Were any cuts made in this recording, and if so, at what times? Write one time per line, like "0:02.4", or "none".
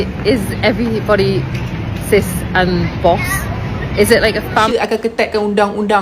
0:04.7